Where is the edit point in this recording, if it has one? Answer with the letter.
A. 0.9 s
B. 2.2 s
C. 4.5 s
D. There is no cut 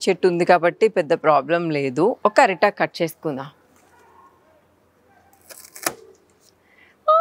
B